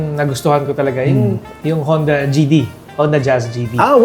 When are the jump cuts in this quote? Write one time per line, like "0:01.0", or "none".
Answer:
0:01.5